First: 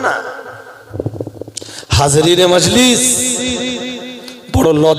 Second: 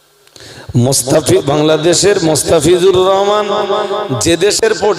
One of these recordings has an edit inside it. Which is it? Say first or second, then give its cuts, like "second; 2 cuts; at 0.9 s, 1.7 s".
first; 1 cut; at 0.9 s